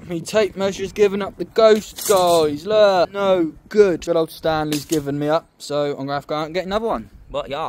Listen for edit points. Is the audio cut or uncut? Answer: cut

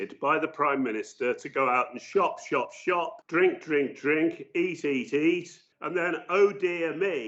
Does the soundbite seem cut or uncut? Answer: uncut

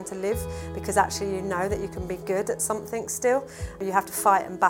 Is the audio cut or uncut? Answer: cut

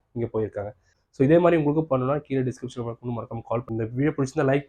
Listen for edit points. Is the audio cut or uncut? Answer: cut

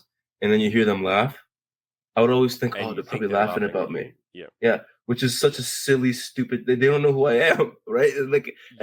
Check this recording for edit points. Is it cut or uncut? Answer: uncut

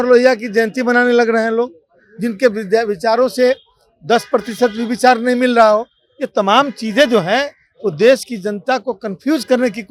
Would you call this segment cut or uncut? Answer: uncut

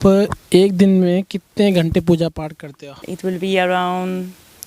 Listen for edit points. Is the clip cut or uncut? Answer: cut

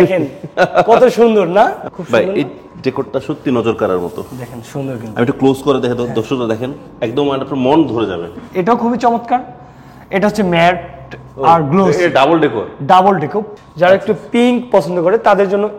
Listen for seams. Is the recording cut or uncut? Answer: cut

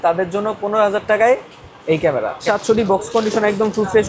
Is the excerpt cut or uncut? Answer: cut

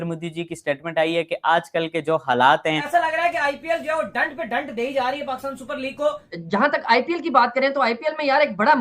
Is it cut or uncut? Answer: cut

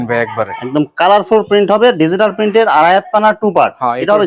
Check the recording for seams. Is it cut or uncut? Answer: uncut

